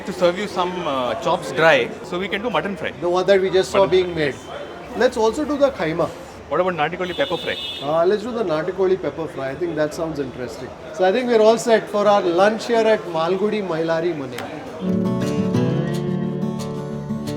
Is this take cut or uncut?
uncut